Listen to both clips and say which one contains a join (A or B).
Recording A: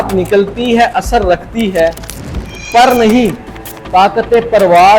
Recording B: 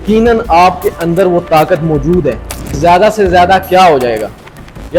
B